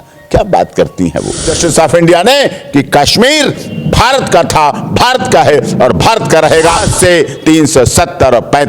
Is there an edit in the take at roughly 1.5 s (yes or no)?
yes